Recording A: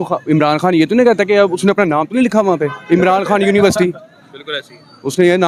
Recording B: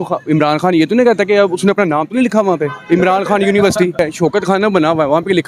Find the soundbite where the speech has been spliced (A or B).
B